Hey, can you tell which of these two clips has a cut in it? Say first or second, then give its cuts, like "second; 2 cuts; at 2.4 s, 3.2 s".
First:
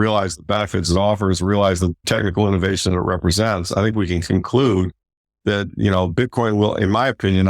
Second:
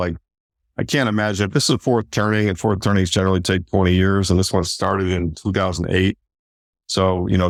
first; 1 cut; at 2.0 s